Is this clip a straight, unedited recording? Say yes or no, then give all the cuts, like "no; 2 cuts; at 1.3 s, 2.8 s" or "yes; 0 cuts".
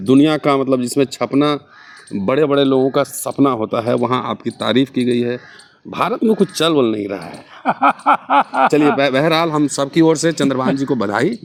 yes; 0 cuts